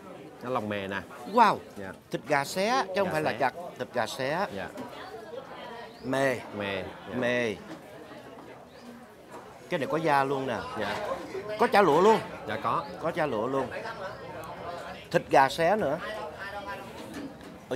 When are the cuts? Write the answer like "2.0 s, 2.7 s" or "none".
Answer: none

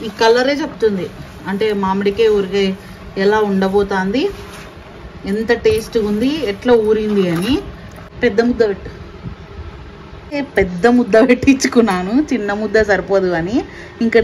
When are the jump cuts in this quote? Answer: 8.0 s, 10.3 s

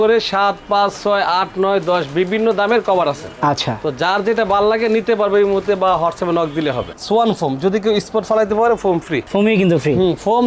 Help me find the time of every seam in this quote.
6.9 s, 9.3 s

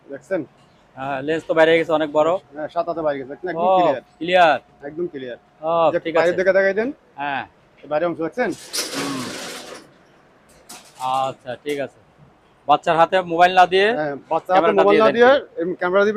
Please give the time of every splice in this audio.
none

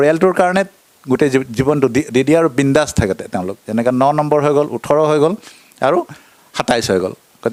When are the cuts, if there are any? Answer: none

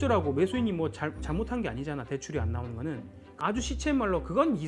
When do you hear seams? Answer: 3.2 s

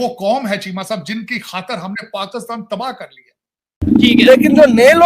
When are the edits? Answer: 3.8 s

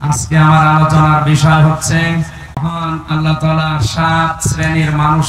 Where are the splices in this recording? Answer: 2.6 s

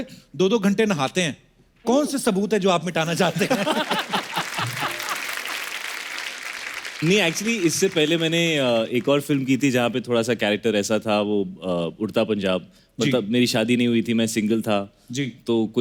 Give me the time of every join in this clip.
none

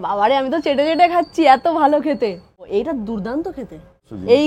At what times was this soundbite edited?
none

